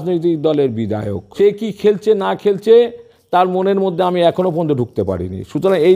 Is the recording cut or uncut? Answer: cut